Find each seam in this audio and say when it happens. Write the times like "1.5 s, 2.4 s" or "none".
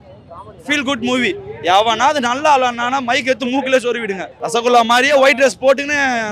4.3 s